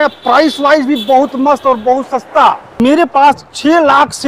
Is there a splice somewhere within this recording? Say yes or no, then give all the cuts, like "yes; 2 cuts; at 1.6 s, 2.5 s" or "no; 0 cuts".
no; 0 cuts